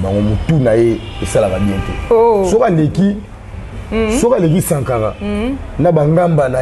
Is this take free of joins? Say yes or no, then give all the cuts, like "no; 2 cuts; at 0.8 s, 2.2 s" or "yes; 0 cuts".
yes; 0 cuts